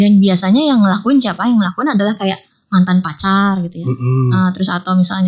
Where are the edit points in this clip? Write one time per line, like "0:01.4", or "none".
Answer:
none